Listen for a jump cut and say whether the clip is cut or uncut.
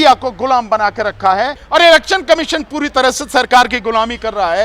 cut